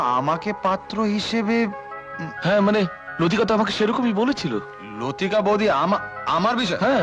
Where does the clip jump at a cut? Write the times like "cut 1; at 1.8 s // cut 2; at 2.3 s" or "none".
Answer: none